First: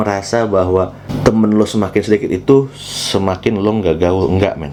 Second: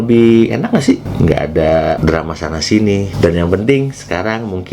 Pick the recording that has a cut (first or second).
second